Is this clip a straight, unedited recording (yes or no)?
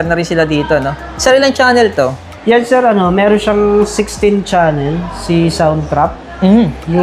yes